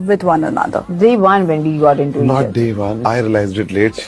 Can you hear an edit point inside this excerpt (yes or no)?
yes